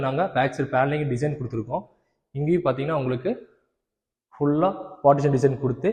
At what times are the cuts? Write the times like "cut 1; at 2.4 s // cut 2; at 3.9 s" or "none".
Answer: none